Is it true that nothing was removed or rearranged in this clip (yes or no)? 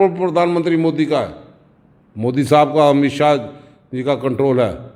yes